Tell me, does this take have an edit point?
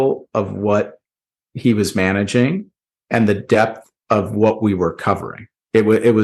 no; 0 cuts

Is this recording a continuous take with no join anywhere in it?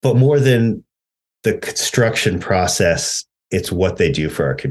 yes; 0 cuts

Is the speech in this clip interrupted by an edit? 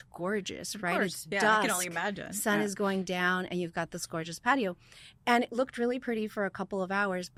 no; 0 cuts

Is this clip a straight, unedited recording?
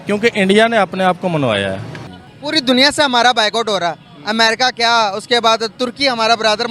no; 1 cut; at 2.0 s

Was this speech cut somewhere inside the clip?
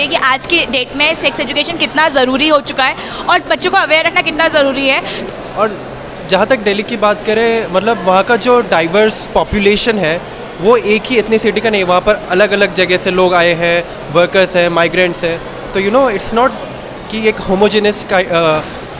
no; 0 cuts

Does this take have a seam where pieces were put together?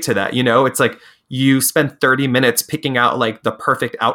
no; 0 cuts

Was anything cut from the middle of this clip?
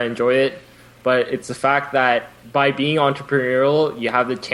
yes; 1 cut; at 2.4 s

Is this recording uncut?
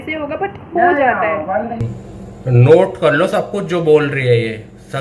no; 1 cut; at 2.3 s

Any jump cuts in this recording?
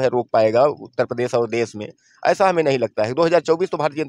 no; 0 cuts

